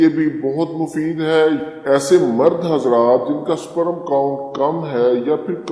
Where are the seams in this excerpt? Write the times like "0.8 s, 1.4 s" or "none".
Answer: 1.7 s